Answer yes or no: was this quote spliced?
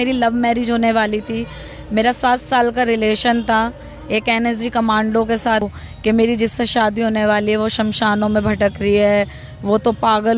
yes